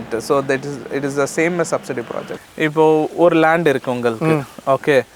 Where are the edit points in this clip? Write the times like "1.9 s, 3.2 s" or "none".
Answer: 2.3 s